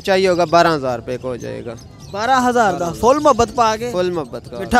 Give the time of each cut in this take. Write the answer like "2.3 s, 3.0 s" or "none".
none